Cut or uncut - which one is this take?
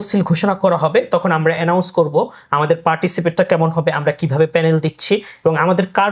uncut